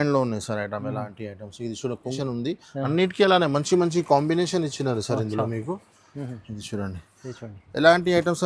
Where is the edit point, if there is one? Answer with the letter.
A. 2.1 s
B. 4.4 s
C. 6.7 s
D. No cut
A